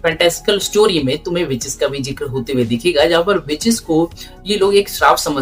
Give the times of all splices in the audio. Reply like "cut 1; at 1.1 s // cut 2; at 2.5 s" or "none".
none